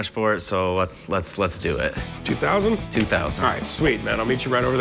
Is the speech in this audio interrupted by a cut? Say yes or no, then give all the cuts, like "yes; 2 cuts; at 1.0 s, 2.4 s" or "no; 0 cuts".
no; 0 cuts